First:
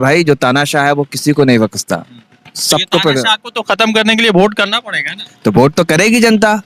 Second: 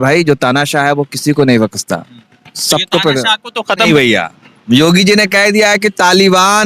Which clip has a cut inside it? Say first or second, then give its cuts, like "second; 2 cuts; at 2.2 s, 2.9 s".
second; 1 cut; at 3.9 s